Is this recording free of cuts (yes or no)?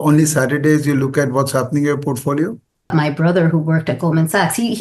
no